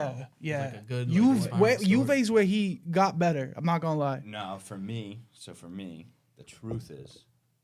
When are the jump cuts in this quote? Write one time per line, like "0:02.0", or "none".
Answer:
none